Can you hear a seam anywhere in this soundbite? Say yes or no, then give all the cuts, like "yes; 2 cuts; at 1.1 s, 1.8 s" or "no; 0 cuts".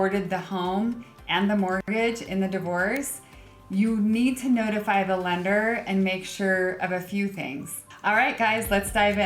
yes; 1 cut; at 7.8 s